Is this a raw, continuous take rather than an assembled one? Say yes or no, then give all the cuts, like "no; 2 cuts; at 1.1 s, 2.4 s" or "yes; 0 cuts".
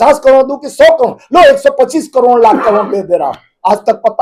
yes; 0 cuts